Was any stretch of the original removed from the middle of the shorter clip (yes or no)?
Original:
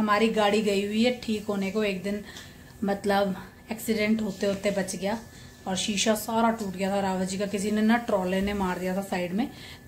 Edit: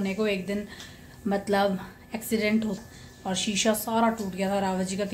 yes